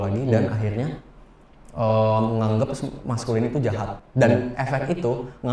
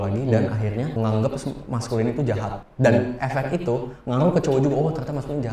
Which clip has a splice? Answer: second; 1 cut; at 1.0 s

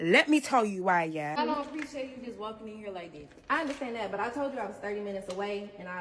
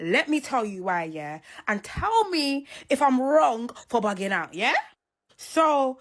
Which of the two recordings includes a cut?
first; 1 cut; at 1.4 s

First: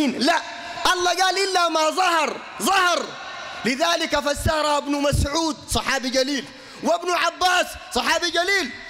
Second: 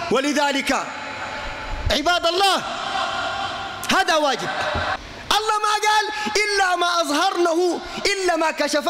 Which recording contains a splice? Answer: second; 1 cut; at 5.0 s

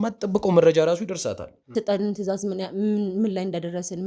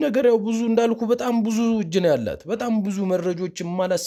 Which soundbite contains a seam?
first; 1 cut; at 1.5 s

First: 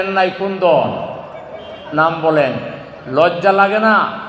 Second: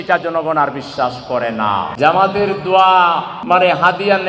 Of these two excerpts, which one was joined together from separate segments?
second; 2 cuts; at 1.9 s, 3.3 s

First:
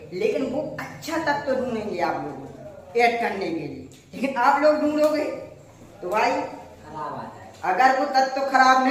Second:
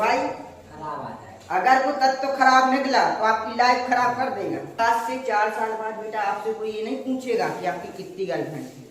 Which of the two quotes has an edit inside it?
second; 1 cut; at 4.8 s

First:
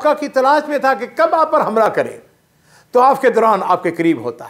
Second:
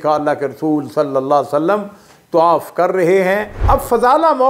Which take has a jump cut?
second; 1 cut; at 3.5 s

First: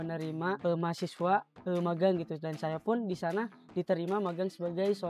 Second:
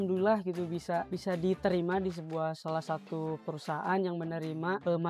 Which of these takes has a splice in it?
second; 1 cut; at 1.1 s

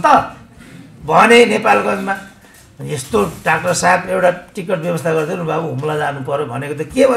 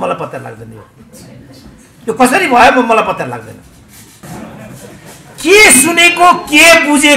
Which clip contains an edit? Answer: second; 1 cut; at 4.2 s

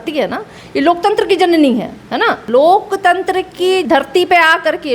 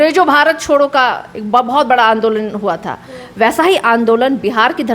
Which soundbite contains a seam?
first; 2 cuts; at 2.4 s, 3.8 s

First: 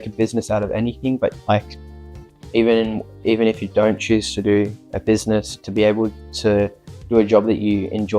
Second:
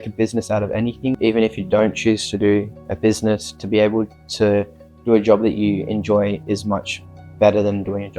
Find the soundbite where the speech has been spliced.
second; 1 cut; at 1.2 s

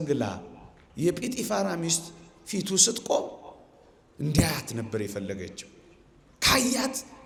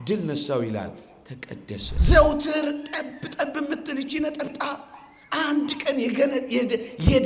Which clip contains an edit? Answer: second; 1 cut; at 1.9 s

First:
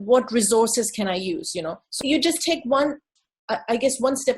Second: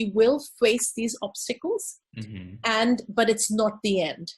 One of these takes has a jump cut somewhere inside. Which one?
first; 1 cut; at 1.9 s

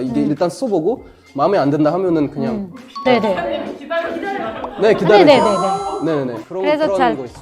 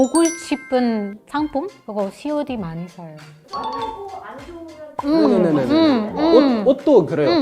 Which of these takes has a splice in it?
second; 1 cut; at 1.4 s

